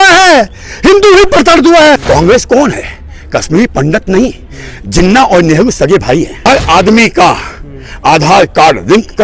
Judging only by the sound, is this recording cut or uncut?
cut